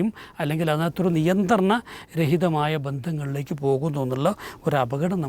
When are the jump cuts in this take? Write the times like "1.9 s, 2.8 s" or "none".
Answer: none